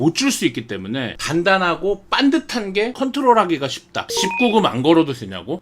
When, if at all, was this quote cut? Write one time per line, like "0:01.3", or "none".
0:01.2
0:02.9
0:04.1